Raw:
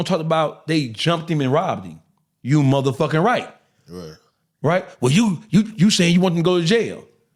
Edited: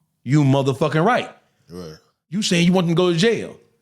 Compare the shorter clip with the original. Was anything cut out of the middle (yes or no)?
yes